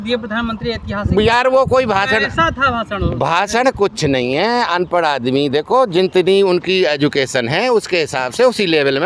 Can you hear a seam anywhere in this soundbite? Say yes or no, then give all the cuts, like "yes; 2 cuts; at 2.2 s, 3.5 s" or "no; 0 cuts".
no; 0 cuts